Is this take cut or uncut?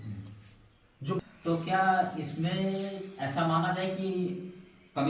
cut